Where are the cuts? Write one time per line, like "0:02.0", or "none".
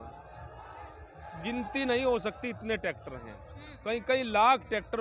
none